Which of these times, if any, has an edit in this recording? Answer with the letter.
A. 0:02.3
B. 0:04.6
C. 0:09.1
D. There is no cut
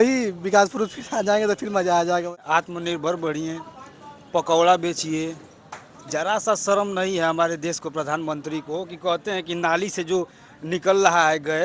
A